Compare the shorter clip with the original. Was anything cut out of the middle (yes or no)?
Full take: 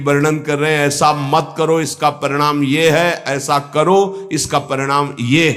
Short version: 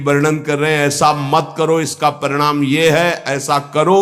no